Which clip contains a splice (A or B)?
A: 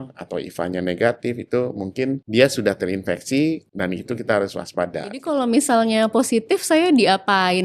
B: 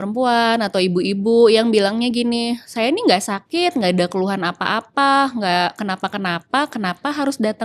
A